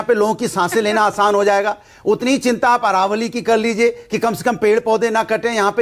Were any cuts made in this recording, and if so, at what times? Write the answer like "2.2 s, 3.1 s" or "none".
2.0 s